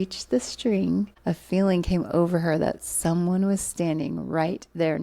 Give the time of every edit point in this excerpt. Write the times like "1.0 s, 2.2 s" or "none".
1.2 s